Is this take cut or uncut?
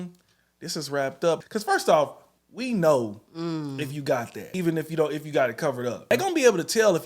cut